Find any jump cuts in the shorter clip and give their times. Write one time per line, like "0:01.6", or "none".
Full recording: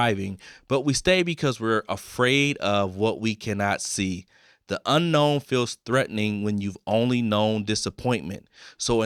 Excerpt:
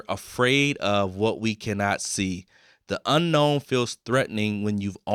none